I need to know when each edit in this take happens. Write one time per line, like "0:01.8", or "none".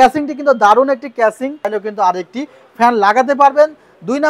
0:01.8